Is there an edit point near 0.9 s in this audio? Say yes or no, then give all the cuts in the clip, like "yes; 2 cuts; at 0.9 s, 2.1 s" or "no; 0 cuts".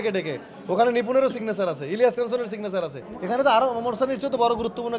no; 1 cut; at 3.1 s